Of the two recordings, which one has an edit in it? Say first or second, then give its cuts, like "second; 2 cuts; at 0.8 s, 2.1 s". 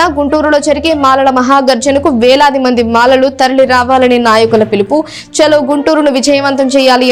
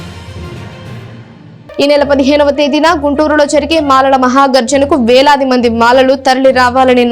second; 1 cut; at 1.1 s